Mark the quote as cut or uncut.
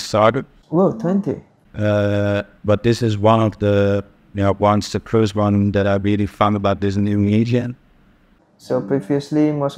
uncut